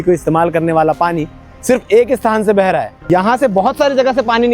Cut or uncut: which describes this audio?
cut